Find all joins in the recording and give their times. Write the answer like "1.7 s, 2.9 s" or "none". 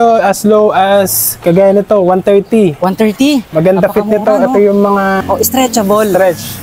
3.5 s, 5.2 s